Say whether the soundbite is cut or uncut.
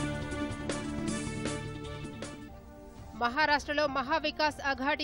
cut